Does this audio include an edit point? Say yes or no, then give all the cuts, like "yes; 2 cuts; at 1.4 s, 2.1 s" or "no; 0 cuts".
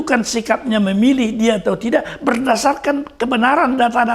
no; 0 cuts